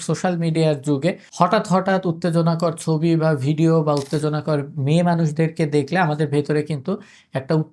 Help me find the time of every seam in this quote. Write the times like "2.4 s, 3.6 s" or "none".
1.2 s